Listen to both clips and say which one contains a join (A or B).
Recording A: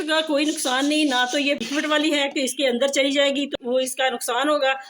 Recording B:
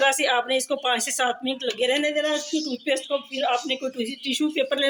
A